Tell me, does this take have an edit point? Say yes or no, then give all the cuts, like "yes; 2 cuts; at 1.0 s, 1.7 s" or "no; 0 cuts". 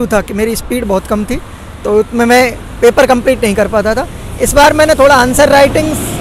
no; 0 cuts